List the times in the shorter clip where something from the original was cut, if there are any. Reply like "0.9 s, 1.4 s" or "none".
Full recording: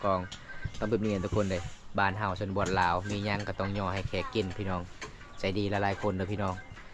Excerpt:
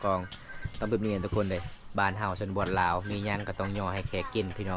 none